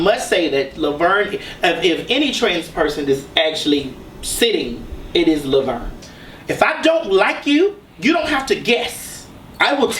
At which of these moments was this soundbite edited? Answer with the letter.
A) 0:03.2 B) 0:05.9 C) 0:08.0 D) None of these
B